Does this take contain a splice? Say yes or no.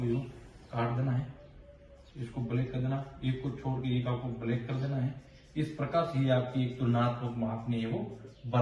no